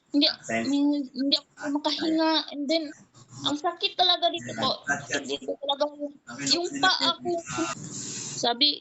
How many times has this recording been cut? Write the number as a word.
one